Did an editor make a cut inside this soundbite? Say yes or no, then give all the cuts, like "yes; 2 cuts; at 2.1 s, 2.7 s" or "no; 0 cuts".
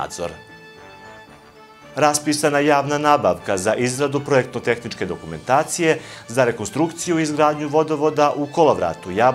yes; 2 cuts; at 0.7 s, 1.9 s